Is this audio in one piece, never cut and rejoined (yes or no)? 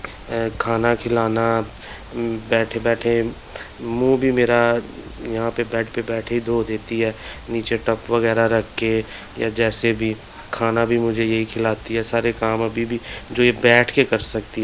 yes